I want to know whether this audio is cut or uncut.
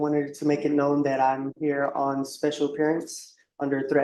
uncut